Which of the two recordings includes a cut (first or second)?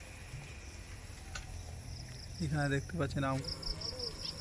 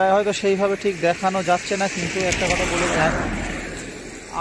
first